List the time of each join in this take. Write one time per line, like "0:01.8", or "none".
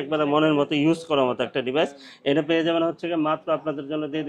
none